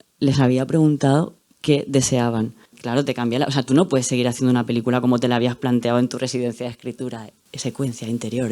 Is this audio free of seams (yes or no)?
no